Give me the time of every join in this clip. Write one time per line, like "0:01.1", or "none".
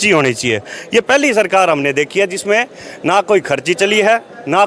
none